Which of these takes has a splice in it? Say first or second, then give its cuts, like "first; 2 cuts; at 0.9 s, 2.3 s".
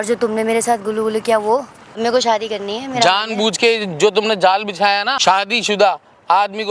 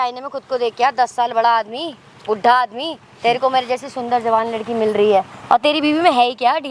first; 2 cuts; at 2.0 s, 5.1 s